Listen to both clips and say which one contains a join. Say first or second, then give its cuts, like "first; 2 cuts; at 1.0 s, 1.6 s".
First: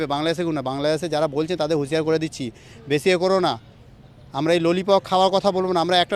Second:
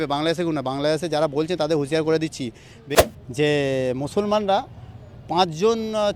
second; 1 cut; at 2.8 s